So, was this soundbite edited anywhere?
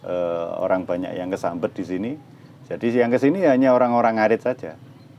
no; 0 cuts

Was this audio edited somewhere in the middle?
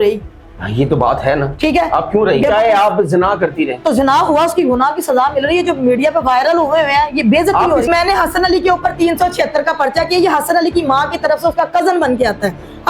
yes; 2 cuts; at 2.4 s, 7.9 s

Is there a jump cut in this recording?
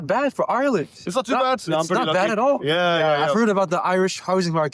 no; 0 cuts

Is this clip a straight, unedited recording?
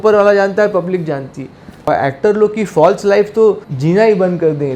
no; 2 cuts; at 1.9 s, 3.7 s

